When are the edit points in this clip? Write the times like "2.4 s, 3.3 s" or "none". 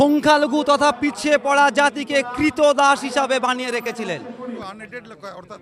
4.7 s